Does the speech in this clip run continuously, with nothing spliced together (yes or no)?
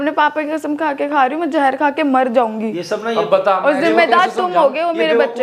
yes